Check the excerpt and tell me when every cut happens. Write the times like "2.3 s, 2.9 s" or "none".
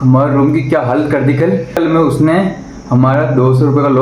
1.7 s